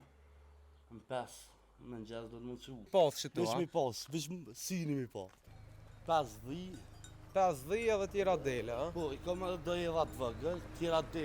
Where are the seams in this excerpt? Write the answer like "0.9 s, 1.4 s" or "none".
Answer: 2.9 s, 5.4 s